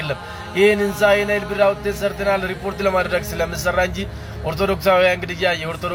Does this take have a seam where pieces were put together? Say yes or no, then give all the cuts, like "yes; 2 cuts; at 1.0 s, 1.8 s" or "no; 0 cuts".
no; 0 cuts